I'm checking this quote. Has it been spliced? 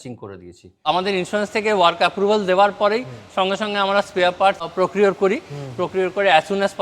yes; 2 cuts; at 0.8 s, 4.6 s

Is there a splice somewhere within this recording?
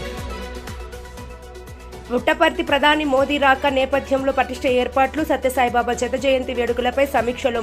yes; 1 cut; at 1.1 s

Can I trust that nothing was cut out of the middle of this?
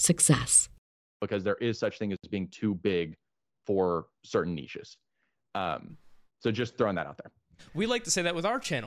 no; 1 cut; at 1.1 s

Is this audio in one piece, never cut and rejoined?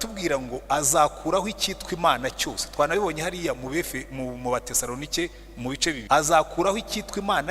no; 1 cut; at 6.0 s

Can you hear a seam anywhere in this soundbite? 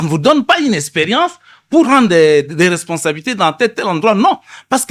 yes; 1 cut; at 1.9 s

